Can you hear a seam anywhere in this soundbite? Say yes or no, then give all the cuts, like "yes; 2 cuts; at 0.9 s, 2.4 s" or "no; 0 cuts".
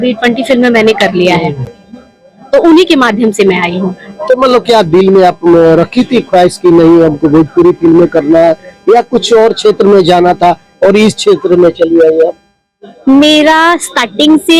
no; 0 cuts